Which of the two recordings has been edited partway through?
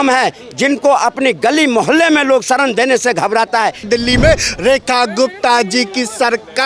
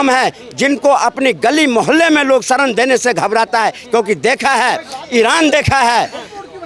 first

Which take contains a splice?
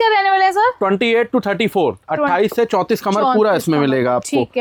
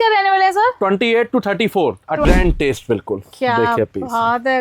second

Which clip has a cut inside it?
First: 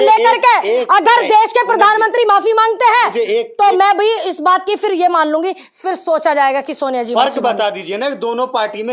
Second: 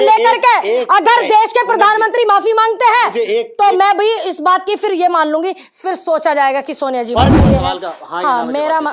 second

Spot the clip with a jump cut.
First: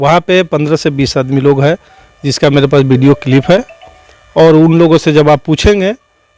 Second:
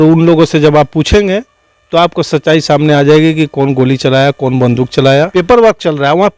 second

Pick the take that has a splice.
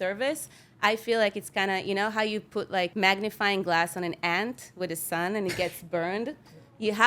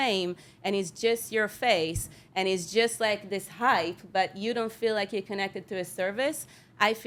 first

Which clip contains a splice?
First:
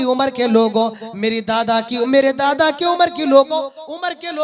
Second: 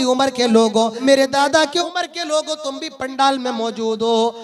second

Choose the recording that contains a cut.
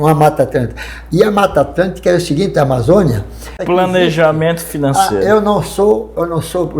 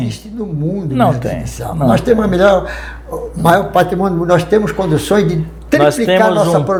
first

